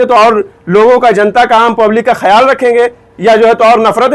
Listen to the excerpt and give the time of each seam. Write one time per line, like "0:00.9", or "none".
none